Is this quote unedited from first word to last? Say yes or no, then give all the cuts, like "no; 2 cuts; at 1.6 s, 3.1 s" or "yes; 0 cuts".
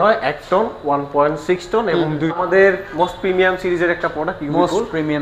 no; 1 cut; at 2.4 s